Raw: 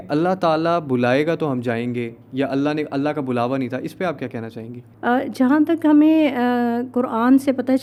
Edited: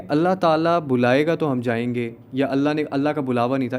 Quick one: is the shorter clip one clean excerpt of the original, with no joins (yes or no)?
yes